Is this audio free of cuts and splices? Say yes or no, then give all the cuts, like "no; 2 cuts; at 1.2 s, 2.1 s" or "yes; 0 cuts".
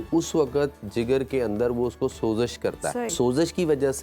no; 1 cut; at 3.1 s